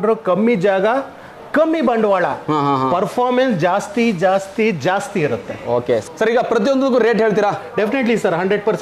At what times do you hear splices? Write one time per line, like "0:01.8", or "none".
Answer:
none

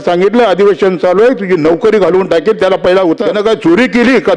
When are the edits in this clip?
0:03.2

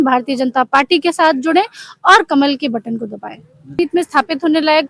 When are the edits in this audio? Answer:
0:03.8

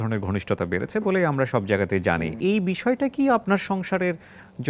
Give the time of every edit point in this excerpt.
0:02.4
0:03.4

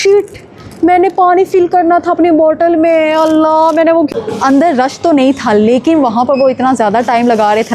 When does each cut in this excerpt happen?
0:04.1

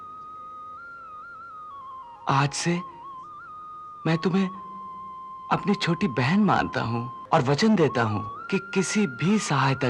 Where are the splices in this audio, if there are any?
0:07.1
0:08.3

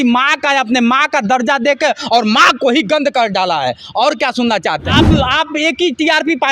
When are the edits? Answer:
0:04.9

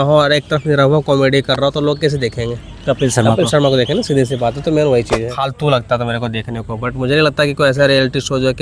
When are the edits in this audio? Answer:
0:05.4

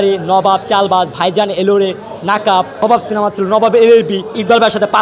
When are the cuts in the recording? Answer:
none

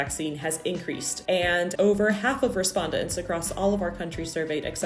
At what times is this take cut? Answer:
0:01.5

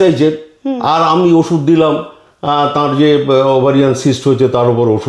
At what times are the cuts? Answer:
none

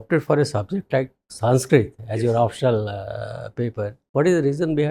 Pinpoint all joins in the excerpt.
0:04.0

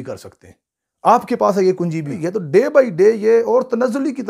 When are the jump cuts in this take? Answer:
0:02.2

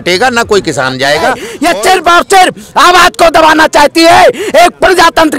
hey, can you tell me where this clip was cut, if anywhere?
0:01.5

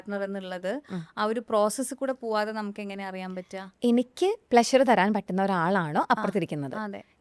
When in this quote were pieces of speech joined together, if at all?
none

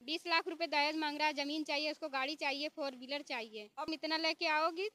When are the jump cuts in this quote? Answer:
0:03.9

